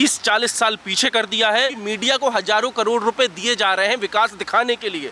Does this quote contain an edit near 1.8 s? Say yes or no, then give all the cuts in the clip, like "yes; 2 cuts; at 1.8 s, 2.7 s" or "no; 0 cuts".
yes; 1 cut; at 1.8 s